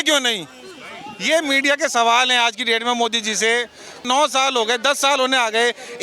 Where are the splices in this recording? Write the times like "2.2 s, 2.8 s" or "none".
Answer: 4.0 s